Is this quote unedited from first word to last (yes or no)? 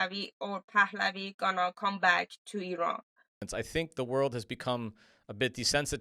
no